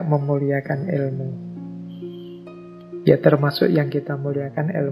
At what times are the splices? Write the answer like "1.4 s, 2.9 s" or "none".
1.2 s, 3.0 s